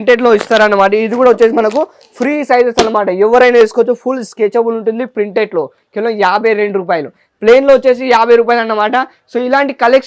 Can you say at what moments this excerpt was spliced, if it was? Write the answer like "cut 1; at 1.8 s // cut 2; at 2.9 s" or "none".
none